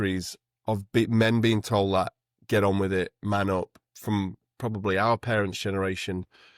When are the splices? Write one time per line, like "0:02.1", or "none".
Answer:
0:03.9